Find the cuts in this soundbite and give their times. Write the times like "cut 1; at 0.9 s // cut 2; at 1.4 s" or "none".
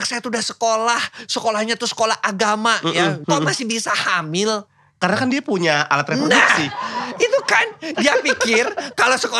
cut 1; at 3.2 s